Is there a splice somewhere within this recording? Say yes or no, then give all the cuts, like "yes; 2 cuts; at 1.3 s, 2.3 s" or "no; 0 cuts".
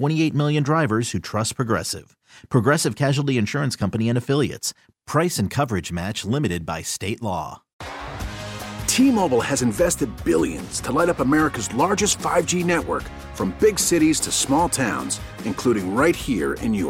yes; 1 cut; at 7.7 s